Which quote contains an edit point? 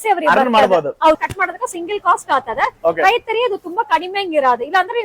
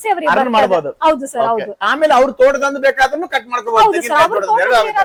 first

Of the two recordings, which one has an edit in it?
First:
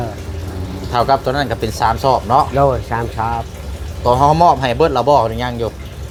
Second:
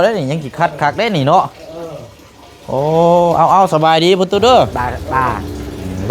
second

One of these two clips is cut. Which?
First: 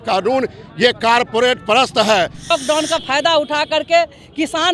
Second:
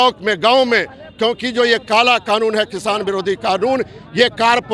first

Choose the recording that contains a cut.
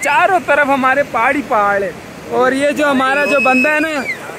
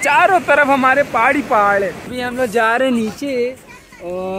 second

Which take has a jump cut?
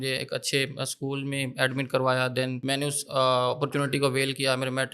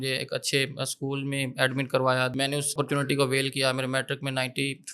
second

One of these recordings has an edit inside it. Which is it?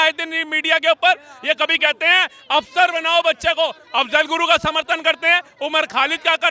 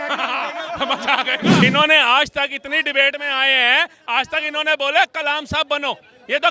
second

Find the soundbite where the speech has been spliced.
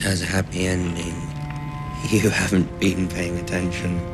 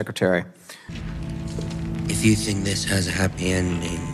second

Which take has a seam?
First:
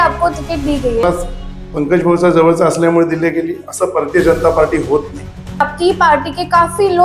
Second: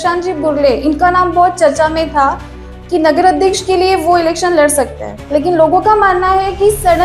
first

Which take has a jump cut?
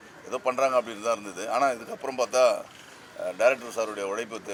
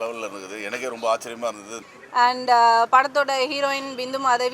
second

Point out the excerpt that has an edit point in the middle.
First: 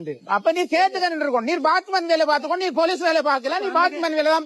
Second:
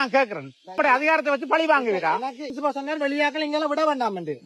second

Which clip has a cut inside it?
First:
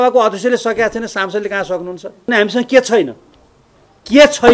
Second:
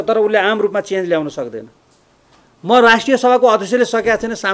first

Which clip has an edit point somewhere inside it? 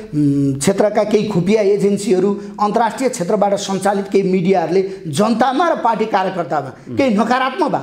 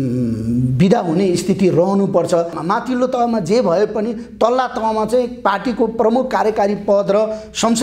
second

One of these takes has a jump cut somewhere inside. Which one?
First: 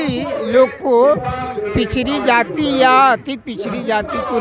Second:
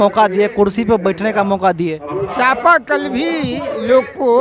second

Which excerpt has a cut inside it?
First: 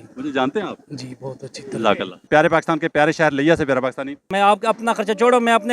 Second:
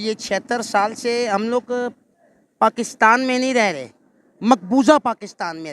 first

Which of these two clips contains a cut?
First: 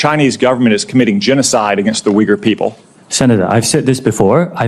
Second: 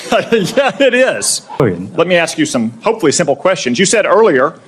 second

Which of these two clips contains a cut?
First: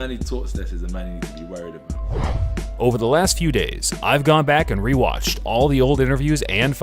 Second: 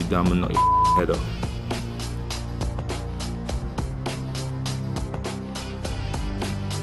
first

